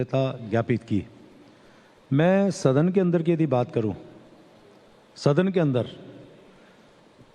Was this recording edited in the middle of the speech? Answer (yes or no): yes